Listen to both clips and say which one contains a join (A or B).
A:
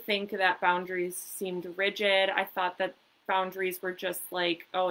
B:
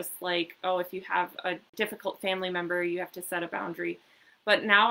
B